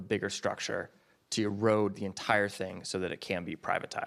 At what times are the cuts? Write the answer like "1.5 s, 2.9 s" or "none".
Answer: none